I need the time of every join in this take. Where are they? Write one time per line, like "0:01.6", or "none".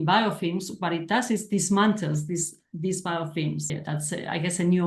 0:03.7